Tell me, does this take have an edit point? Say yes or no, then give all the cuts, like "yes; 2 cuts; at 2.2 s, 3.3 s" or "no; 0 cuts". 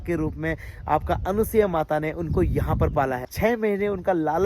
yes; 1 cut; at 3.3 s